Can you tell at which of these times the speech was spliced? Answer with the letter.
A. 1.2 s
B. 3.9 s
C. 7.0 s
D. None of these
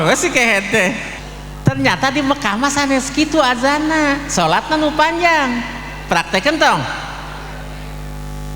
A